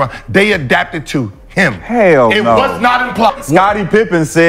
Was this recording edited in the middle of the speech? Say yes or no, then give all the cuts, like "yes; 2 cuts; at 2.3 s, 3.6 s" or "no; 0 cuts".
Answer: yes; 1 cut; at 3.4 s